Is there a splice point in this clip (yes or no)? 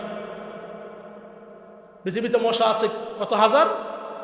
no